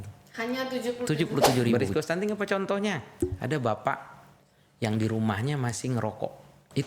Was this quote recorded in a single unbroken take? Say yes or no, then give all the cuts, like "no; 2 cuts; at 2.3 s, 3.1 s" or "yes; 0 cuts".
no; 1 cut; at 1.7 s